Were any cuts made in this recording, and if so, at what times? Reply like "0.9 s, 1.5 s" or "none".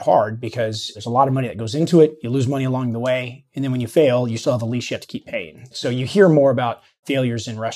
5.7 s